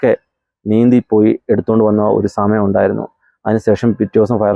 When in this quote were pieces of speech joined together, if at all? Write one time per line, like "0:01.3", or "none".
none